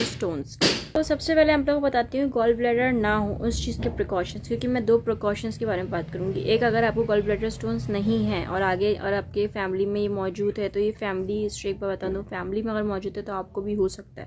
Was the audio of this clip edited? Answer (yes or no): no